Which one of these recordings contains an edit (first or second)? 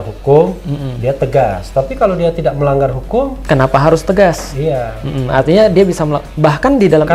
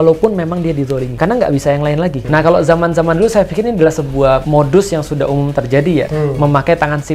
second